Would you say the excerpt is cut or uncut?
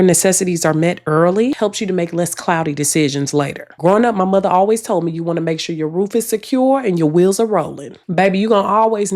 cut